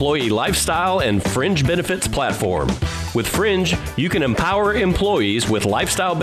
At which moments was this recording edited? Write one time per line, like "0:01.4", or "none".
none